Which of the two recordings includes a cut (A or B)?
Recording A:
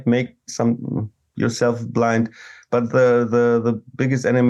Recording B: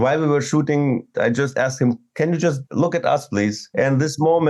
B